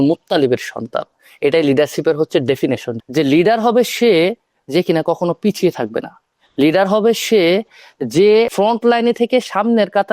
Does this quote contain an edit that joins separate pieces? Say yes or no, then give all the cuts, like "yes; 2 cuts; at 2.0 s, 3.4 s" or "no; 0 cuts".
yes; 2 cuts; at 2.9 s, 8.5 s